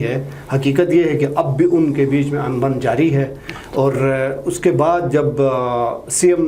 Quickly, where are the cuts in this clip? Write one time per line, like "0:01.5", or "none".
none